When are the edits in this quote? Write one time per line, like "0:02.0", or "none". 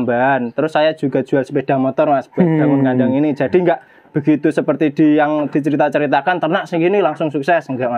none